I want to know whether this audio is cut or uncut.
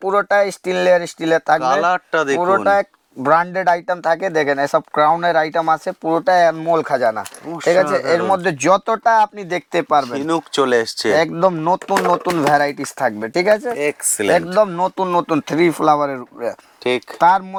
uncut